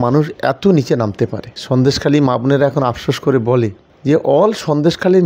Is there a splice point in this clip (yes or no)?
yes